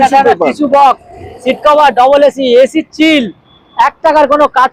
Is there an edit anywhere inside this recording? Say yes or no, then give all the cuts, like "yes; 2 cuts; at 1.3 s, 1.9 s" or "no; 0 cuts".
no; 0 cuts